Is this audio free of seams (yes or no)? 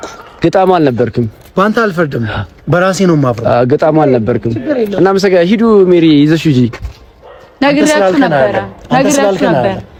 yes